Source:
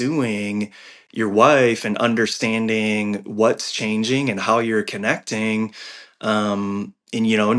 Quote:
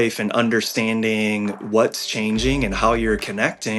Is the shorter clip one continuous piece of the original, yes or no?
yes